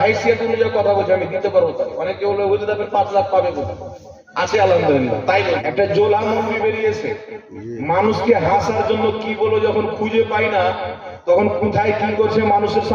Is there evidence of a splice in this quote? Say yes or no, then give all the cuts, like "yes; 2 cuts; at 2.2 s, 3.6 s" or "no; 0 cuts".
yes; 1 cut; at 5.6 s